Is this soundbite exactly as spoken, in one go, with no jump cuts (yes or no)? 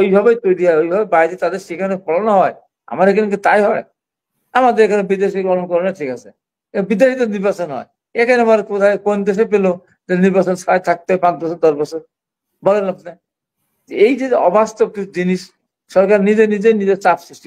yes